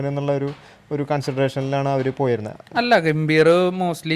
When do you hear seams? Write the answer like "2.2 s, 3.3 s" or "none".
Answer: none